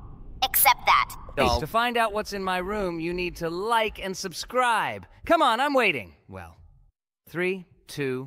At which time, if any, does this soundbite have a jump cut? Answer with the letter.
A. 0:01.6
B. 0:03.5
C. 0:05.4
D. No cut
A